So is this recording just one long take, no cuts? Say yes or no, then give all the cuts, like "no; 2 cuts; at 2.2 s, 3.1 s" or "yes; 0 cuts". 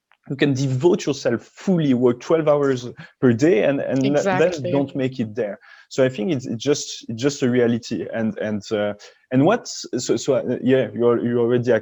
yes; 0 cuts